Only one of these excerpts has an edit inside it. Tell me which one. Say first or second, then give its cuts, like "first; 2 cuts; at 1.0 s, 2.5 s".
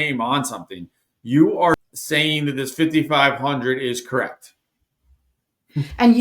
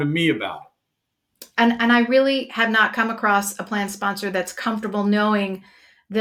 first; 1 cut; at 1.7 s